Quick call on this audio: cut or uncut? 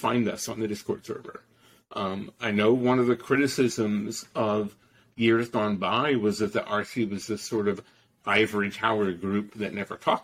uncut